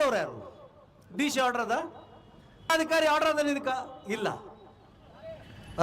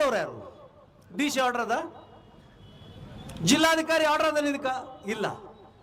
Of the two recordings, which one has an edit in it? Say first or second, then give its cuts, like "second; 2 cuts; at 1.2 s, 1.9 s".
first; 1 cut; at 2.7 s